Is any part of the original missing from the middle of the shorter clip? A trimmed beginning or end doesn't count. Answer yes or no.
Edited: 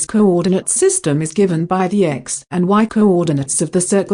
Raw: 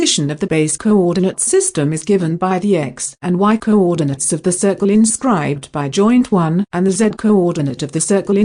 no